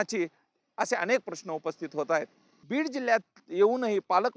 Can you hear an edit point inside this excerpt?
yes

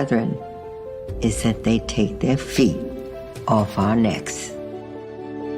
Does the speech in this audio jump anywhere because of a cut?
yes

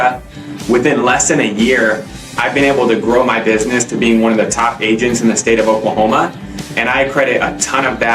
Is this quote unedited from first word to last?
yes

